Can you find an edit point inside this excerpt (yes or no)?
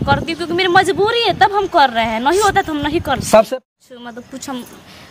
yes